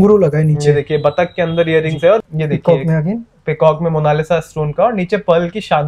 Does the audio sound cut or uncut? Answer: cut